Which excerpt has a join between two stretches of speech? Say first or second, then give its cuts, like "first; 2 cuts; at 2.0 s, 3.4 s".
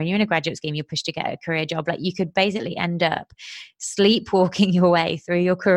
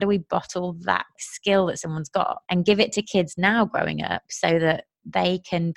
second; 2 cuts; at 1.2 s, 2.4 s